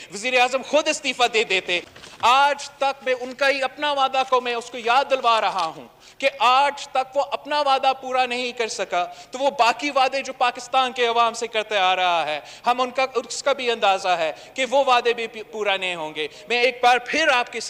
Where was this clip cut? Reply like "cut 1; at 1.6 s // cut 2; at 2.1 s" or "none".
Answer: none